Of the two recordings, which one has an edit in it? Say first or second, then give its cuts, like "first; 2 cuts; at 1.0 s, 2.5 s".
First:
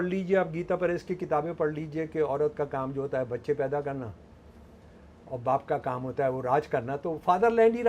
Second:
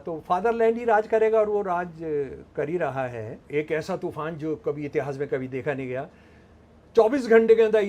second; 1 cut; at 3.3 s